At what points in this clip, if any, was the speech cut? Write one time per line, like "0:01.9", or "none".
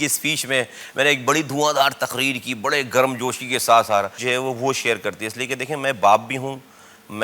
0:04.2